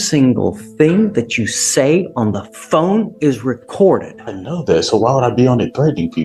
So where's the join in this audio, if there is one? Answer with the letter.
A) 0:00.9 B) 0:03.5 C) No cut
C